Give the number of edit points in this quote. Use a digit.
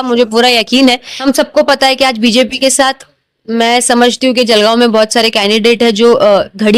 1